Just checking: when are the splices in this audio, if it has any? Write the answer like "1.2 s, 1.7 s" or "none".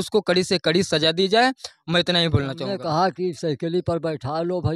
2.7 s

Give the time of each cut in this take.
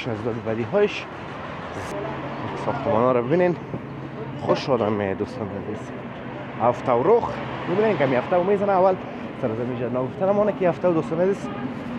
1.9 s

